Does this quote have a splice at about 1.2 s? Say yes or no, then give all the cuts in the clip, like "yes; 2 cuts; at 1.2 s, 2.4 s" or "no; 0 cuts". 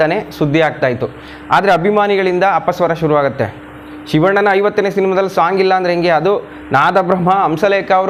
no; 0 cuts